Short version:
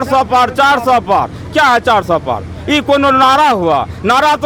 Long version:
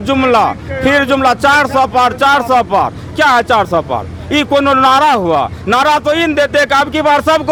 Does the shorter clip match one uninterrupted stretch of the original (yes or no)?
yes